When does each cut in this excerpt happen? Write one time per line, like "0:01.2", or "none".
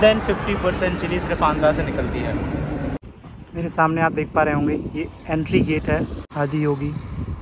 0:03.0
0:06.2